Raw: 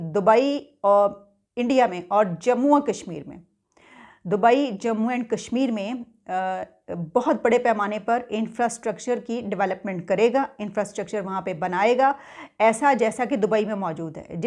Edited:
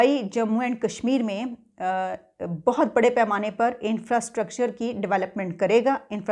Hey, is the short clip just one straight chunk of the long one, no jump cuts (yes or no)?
yes